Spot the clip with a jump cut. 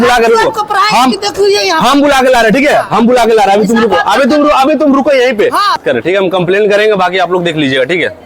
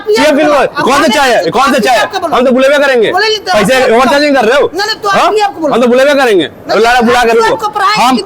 first; 1 cut; at 5.8 s

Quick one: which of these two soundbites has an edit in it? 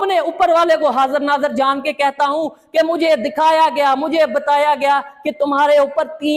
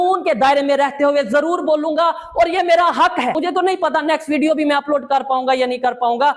second; 1 cut; at 3.3 s

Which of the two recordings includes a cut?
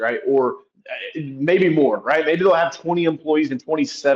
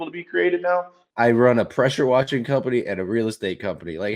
second; 1 cut; at 1.1 s

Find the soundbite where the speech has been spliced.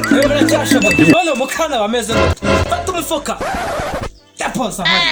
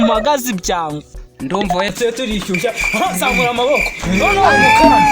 second; 1 cut; at 1.9 s

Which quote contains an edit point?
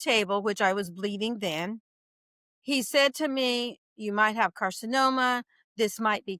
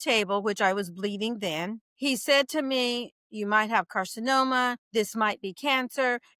second; 2 cuts; at 1.8 s, 4.8 s

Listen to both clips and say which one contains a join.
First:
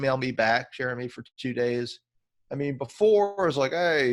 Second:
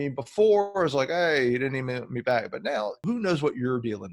second; 1 cut; at 3.0 s

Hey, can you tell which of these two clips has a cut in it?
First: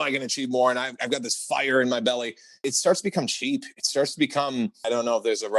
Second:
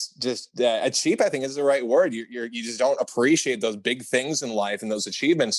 first; 2 cuts; at 2.6 s, 4.8 s

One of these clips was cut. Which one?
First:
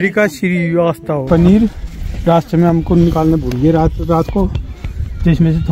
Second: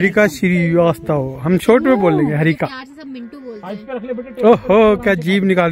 first; 1 cut; at 1.2 s

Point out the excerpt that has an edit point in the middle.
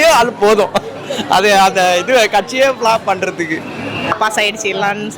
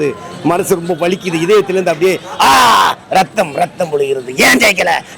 first; 1 cut; at 4.1 s

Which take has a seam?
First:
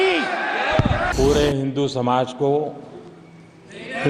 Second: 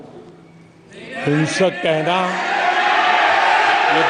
first; 1 cut; at 1.1 s

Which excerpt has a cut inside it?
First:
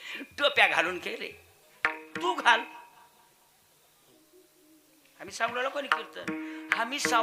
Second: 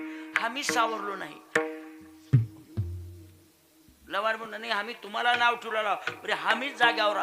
first; 1 cut; at 4.1 s

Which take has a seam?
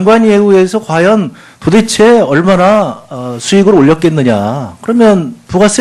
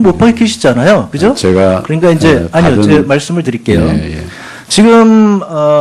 first; 1 cut; at 1.3 s

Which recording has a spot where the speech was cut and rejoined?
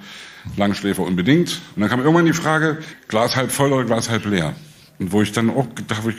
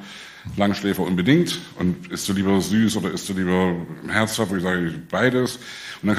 first; 2 cuts; at 1.6 s, 2.9 s

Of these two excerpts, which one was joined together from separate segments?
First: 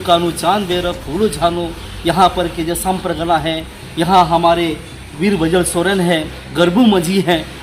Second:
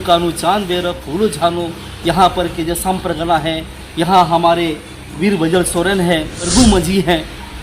second; 1 cut; at 6.5 s

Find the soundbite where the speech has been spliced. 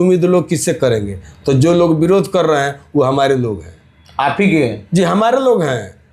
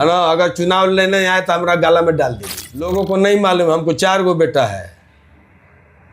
second; 1 cut; at 2.9 s

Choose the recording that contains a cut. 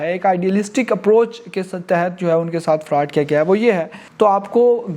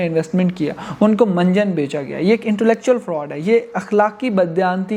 first; 1 cut; at 4.0 s

